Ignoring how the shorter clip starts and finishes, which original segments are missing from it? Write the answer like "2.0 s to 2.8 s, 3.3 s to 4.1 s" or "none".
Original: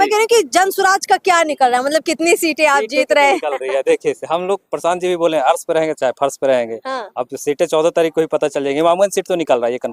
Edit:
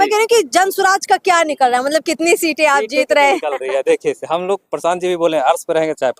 none